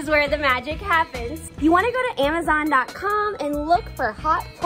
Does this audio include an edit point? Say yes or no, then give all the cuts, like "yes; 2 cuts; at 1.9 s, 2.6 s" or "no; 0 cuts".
no; 0 cuts